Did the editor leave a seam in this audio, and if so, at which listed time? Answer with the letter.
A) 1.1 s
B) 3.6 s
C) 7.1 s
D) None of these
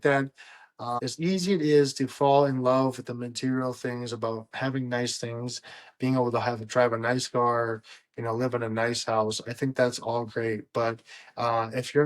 A